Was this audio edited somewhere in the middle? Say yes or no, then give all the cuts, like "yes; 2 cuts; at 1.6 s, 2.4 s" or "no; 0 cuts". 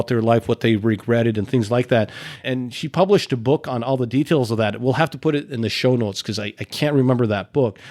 no; 0 cuts